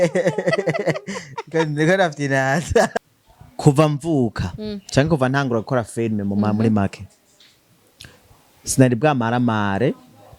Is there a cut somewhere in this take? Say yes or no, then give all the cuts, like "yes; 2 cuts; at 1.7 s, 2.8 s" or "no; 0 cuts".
yes; 1 cut; at 2.9 s